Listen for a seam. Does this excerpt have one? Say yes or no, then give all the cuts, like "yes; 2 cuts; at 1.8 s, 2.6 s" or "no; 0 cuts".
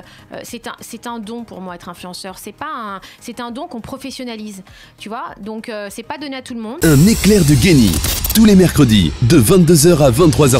yes; 1 cut; at 6.7 s